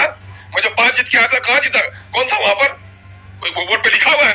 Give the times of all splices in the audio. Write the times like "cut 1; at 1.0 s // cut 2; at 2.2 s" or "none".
none